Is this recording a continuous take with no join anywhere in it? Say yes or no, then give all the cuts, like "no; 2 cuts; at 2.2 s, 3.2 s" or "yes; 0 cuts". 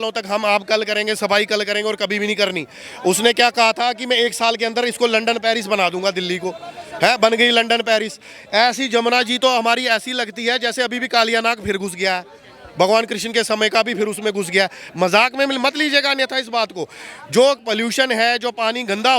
yes; 0 cuts